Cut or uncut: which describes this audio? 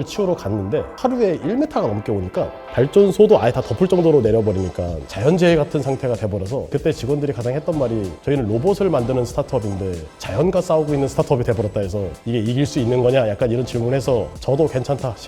cut